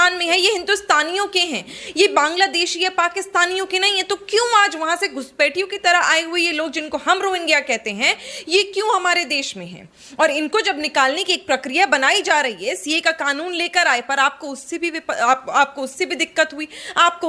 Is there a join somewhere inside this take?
no; 0 cuts

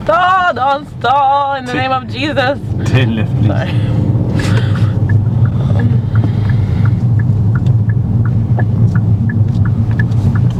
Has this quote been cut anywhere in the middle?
no; 0 cuts

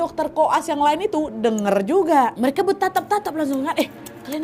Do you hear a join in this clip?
no; 0 cuts

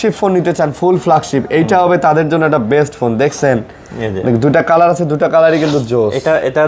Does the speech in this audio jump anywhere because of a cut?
no; 0 cuts

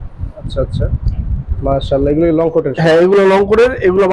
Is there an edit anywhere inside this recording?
no; 0 cuts

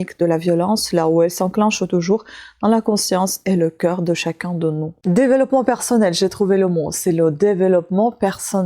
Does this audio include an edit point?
yes; 1 cut; at 4.9 s

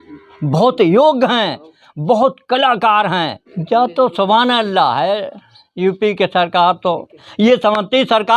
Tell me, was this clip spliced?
yes; 2 cuts; at 3.5 s, 7.3 s

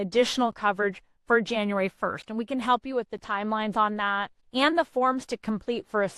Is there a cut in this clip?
yes; 1 cut; at 4.4 s

